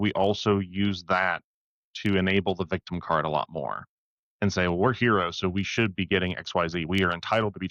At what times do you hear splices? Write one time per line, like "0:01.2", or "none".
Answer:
none